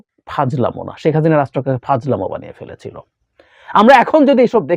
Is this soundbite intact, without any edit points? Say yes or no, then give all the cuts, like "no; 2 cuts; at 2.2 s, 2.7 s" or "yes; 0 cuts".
yes; 0 cuts